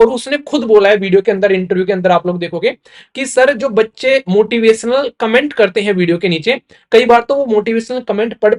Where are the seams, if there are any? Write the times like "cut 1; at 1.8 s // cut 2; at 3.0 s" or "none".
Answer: none